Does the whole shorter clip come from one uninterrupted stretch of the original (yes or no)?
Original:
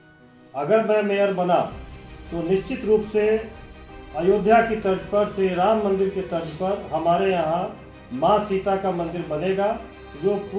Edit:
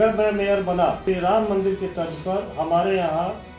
no